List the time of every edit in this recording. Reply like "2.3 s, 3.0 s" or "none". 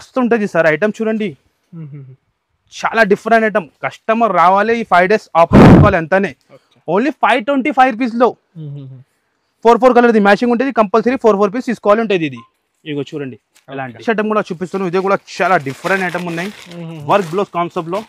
none